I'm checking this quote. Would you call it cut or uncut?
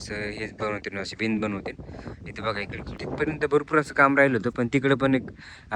cut